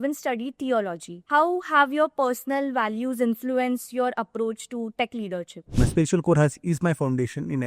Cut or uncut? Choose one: cut